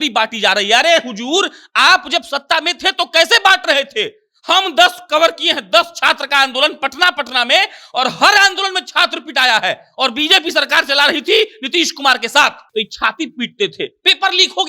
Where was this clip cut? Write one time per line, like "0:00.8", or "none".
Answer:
0:12.6